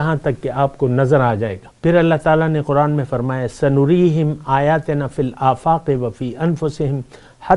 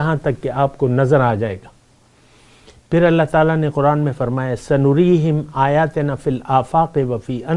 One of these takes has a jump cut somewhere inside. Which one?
first; 1 cut; at 1.6 s

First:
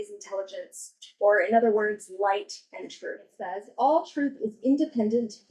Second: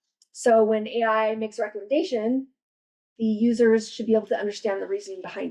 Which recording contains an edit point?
first; 1 cut; at 3.6 s

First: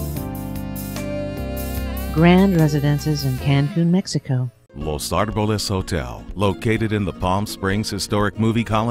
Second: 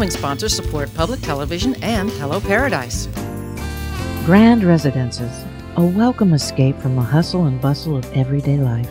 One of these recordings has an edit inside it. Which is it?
first; 1 cut; at 4.6 s

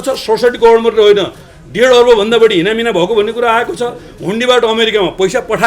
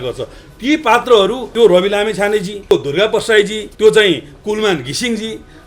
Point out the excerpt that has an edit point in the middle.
second; 3 cuts; at 1.4 s, 2.7 s, 3.6 s

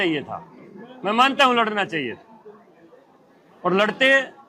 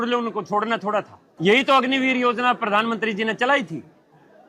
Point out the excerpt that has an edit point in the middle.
second; 1 cut; at 1.2 s

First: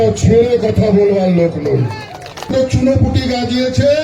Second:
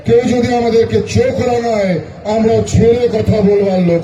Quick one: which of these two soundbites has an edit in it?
first; 1 cut; at 2.5 s

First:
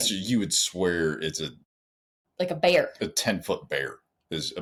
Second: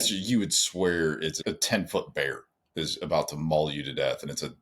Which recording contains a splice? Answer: second; 1 cut; at 1.4 s

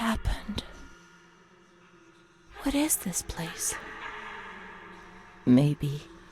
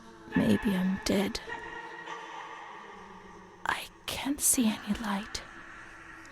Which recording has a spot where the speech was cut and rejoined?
second; 2 cuts; at 1.5 s, 3.6 s

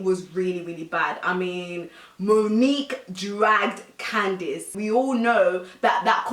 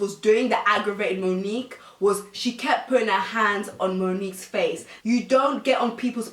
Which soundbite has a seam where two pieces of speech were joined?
first; 1 cut; at 4.7 s

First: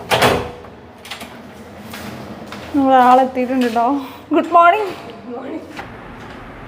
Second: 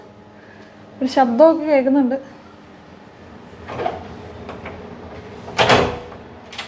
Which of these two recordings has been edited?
first; 1 cut; at 5.8 s

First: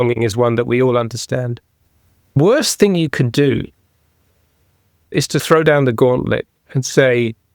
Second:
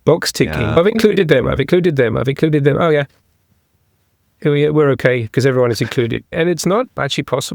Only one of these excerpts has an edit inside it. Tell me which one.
first; 2 cuts; at 2.4 s, 5.0 s

